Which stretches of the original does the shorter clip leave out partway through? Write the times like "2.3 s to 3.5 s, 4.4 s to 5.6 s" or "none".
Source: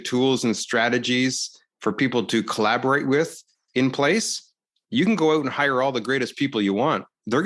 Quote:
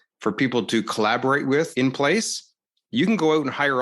3.3 s to 3.7 s